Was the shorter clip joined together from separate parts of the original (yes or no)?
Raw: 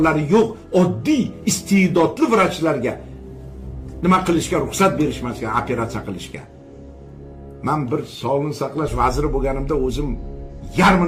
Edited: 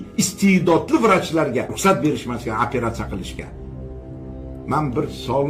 yes